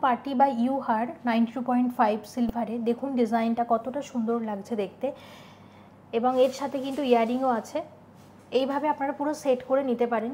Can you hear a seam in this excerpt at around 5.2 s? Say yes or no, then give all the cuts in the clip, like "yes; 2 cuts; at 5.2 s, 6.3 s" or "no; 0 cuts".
no; 0 cuts